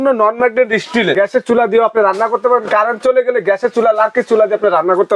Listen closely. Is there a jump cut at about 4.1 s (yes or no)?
no